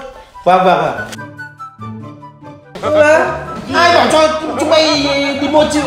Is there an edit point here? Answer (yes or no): no